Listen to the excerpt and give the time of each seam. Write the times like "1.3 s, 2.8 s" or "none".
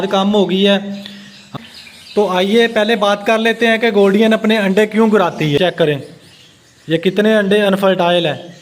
1.5 s, 5.6 s